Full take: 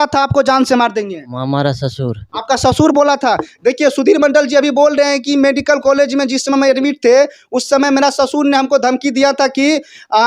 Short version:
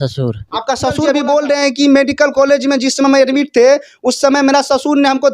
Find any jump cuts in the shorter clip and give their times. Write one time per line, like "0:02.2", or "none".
0:01.0